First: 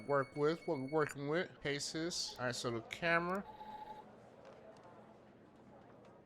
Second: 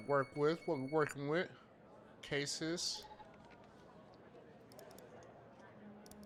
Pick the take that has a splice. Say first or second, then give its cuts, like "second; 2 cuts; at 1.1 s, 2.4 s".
first; 1 cut; at 2.2 s